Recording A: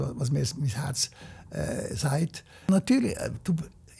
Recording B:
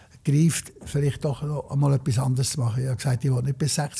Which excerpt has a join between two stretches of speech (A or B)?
A